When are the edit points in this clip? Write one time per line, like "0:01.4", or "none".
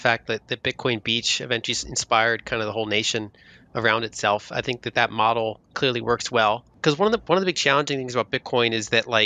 0:06.7